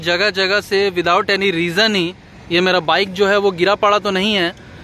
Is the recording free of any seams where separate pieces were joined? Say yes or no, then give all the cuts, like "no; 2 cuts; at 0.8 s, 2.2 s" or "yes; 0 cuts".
yes; 0 cuts